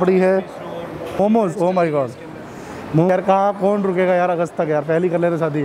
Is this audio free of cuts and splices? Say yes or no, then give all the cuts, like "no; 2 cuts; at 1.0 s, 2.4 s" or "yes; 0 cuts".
no; 2 cuts; at 1.1 s, 3.1 s